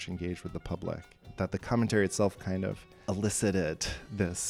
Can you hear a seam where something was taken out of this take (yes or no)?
yes